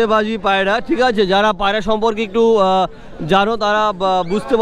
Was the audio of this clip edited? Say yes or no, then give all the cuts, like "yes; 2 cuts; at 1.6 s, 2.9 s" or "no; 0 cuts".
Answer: no; 0 cuts